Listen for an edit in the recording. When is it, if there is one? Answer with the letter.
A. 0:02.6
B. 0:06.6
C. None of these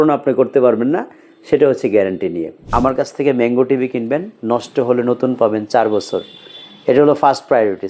A